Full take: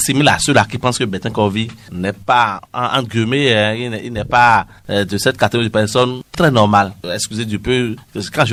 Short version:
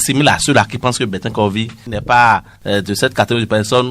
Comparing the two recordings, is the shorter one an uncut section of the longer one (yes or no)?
no